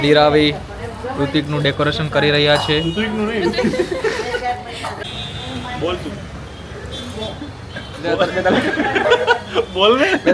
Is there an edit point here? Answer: yes; 1 cut; at 5.0 s

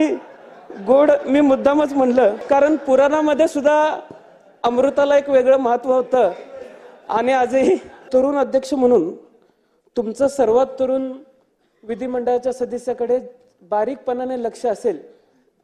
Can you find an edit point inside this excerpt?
yes; 2 cuts; at 2.4 s, 8.0 s

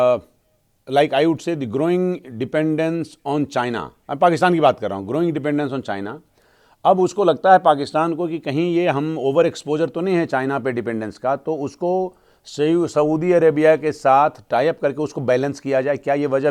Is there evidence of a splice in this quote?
no; 0 cuts

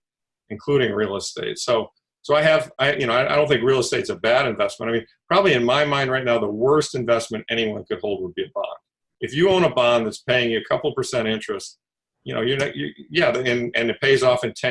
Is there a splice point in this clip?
yes; 1 cut; at 9.1 s

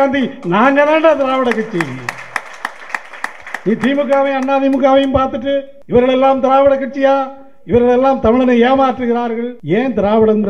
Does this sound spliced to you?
yes; 2 cuts; at 5.7 s, 9.5 s

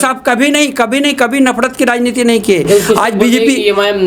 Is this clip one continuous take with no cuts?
yes; 0 cuts

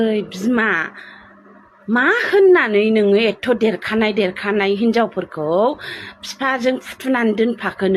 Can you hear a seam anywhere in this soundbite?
no; 0 cuts

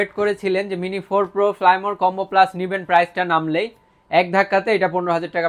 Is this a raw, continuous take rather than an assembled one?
yes; 0 cuts

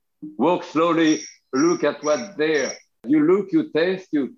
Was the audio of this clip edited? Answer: yes; 1 cut; at 3.0 s

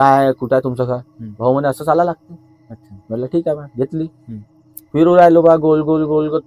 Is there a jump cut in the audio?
no; 0 cuts

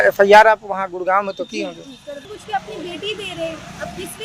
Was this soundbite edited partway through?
yes; 1 cut; at 2.3 s

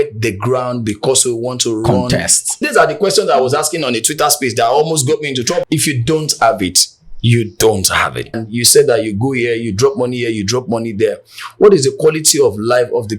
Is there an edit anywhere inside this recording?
yes; 3 cuts; at 2.6 s, 5.6 s, 8.4 s

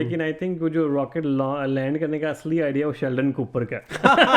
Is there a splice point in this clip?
no; 0 cuts

